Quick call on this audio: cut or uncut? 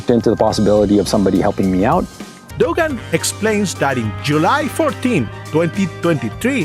cut